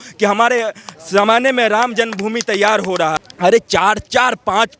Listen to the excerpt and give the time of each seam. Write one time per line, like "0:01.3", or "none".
0:03.2